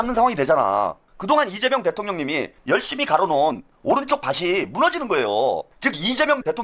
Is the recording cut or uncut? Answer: cut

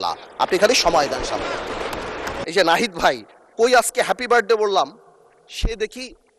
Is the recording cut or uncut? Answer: cut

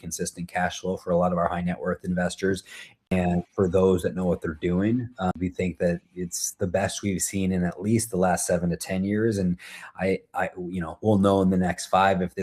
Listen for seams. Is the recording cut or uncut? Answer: cut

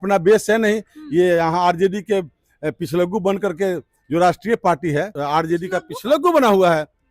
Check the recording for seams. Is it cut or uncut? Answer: cut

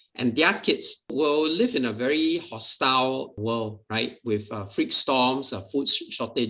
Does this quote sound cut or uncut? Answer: cut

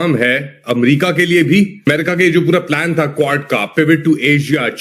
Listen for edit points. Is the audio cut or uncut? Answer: cut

